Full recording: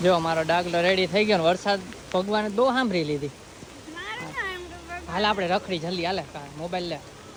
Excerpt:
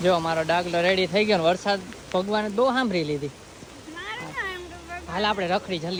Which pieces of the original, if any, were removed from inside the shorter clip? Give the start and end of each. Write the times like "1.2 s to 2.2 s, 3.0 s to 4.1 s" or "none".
none